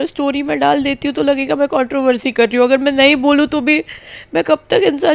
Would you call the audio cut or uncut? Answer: uncut